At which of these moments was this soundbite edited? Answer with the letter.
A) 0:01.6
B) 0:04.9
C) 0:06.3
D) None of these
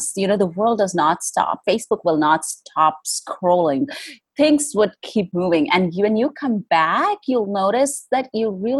A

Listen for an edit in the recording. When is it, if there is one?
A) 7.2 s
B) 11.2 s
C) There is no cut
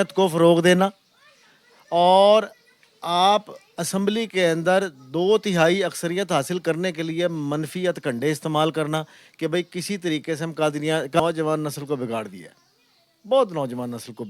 B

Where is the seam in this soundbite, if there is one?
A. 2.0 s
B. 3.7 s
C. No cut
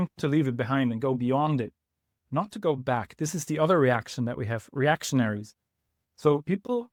C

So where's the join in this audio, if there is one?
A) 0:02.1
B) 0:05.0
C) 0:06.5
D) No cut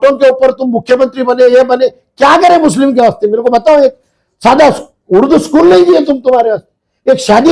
D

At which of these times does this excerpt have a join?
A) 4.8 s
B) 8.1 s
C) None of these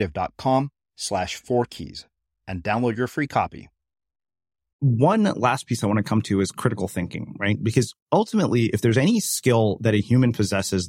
A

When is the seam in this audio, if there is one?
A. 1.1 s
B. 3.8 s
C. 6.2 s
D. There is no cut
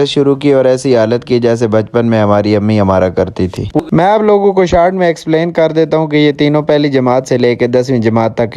B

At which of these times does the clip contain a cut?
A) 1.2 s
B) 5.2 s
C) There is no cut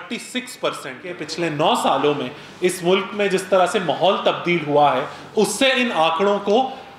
A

